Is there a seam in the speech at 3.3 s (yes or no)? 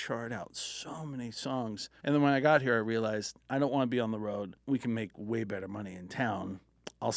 no